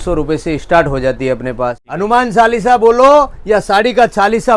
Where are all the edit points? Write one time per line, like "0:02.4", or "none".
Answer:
0:01.8